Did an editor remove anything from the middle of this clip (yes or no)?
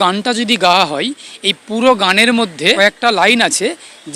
yes